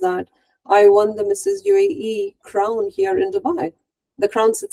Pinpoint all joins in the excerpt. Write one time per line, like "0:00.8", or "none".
none